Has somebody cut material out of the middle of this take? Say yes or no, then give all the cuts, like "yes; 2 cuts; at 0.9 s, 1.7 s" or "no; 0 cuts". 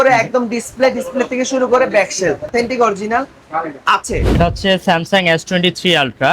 yes; 2 cuts; at 2.5 s, 4.3 s